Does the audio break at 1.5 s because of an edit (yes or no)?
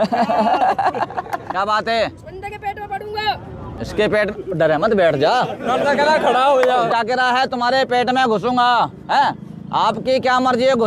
yes